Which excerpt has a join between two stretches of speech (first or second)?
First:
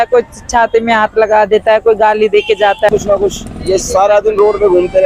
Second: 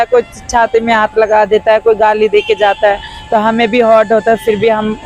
first